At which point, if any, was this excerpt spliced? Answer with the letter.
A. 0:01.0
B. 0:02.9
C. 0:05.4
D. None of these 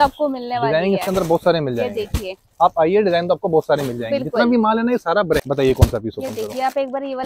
C